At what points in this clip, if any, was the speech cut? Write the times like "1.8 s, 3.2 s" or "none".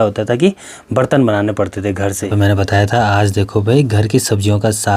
2.3 s